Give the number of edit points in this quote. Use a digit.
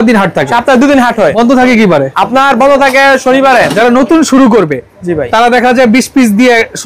3